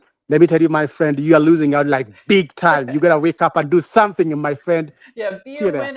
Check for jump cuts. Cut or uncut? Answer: uncut